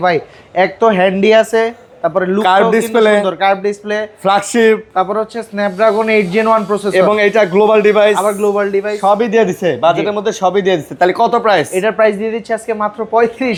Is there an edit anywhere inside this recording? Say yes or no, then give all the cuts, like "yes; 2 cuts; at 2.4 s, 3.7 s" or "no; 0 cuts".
no; 0 cuts